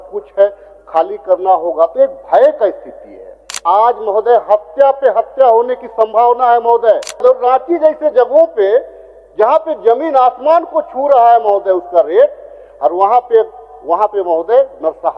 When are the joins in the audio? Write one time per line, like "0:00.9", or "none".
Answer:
0:03.6
0:07.2